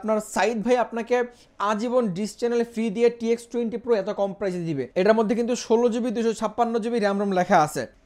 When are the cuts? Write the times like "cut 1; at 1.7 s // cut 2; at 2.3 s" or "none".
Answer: cut 1; at 4.9 s